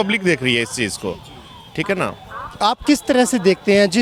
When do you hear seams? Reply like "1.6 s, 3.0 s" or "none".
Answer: none